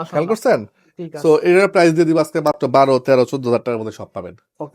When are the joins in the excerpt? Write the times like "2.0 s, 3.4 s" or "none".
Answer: none